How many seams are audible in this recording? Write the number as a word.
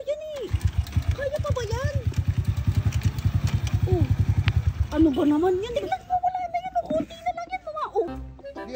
two